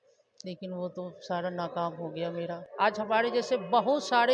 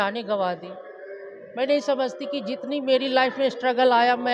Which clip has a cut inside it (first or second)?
first